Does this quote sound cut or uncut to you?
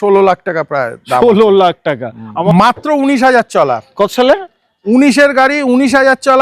cut